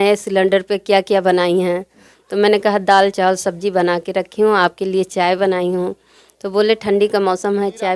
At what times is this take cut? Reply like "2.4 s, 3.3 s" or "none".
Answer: none

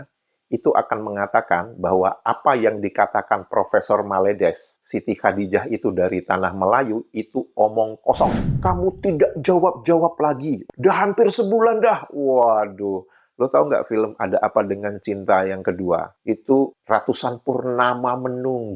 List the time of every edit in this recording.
8.5 s, 10.6 s

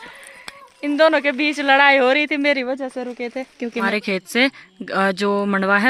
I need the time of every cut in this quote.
3.9 s

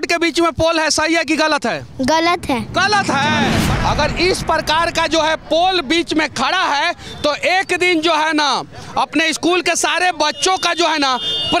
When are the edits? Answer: 3.6 s

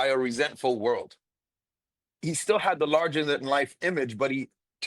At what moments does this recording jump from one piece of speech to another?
2.2 s

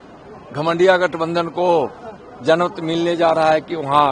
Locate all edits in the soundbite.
none

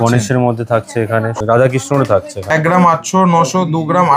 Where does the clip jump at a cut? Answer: 1.3 s, 2.5 s

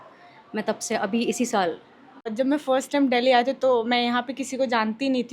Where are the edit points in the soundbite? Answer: 2.3 s

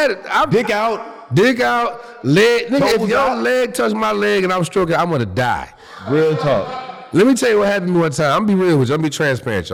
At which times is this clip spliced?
none

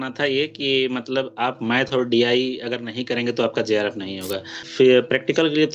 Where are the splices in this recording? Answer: 4.6 s

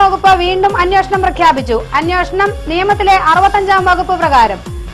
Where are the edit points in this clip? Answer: none

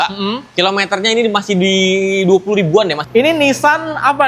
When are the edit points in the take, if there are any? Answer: 3.0 s

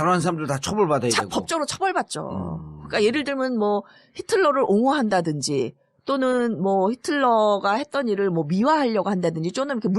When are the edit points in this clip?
7.1 s

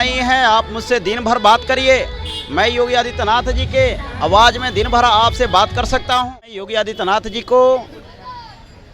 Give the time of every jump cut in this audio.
6.6 s

